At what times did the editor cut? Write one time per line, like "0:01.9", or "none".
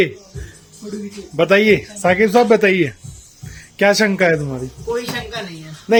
none

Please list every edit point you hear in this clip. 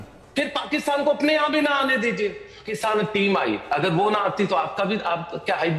0:02.7

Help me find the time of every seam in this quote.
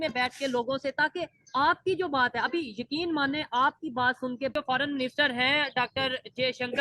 0:04.5

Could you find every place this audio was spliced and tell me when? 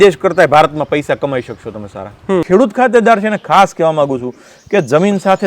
0:02.4

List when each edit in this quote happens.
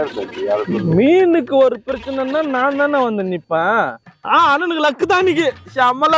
0:03.9

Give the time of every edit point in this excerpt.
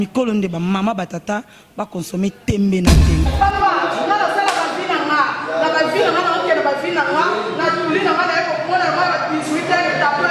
0:03.3

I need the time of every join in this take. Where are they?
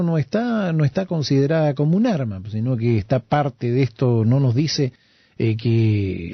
none

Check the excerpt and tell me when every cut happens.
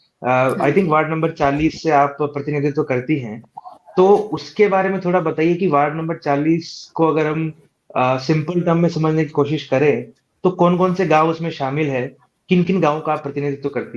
none

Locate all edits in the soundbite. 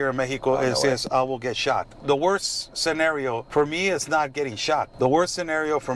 0:01.9
0:03.4
0:04.9

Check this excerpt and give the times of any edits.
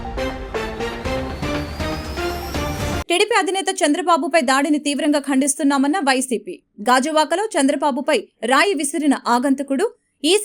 0:03.0

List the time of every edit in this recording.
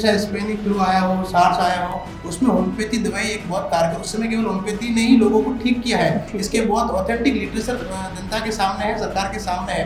none

